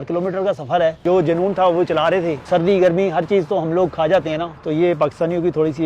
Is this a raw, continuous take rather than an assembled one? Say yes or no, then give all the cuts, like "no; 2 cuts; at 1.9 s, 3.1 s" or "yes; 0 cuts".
no; 3 cuts; at 1.0 s, 2.4 s, 4.5 s